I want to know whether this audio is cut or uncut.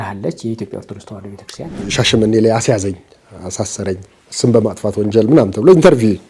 cut